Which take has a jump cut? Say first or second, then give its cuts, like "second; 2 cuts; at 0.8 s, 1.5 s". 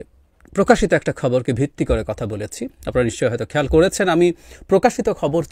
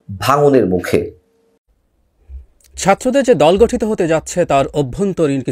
second; 1 cut; at 1.6 s